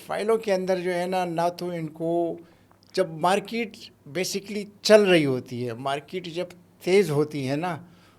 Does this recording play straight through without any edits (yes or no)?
yes